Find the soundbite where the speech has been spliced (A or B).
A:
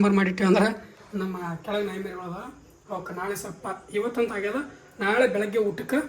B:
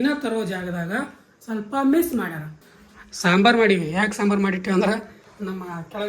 B